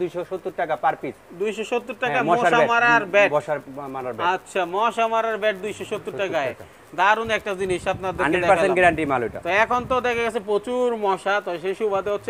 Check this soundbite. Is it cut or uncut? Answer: uncut